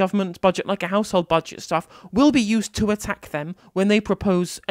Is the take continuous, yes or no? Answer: yes